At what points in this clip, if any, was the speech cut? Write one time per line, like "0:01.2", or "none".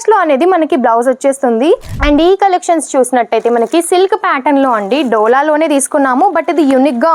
0:02.0